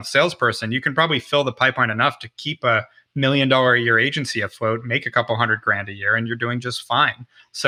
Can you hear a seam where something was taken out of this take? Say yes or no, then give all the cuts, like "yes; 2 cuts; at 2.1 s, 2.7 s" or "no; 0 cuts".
no; 0 cuts